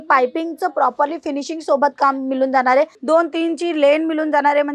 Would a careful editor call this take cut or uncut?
cut